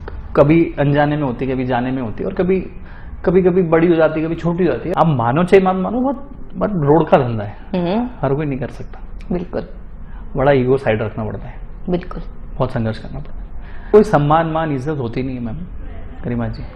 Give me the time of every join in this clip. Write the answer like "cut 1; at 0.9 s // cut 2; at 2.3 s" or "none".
cut 1; at 4.8 s // cut 2; at 13.8 s

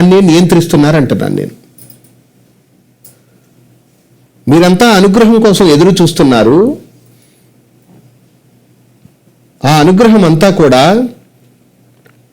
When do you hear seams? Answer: cut 1; at 3.0 s

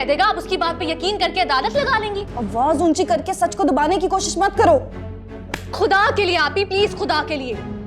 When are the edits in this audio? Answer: cut 1; at 2.3 s

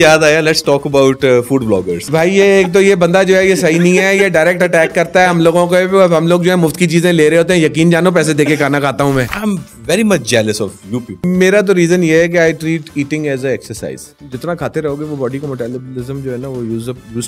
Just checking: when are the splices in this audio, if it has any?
cut 1; at 2.0 s // cut 2; at 9.3 s // cut 3; at 11.2 s

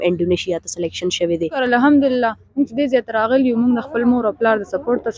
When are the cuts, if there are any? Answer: cut 1; at 1.6 s

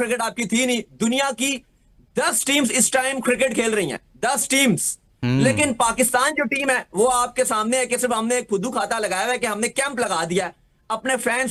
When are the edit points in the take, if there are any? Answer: none

